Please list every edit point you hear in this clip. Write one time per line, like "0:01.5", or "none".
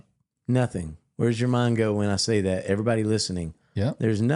0:01.0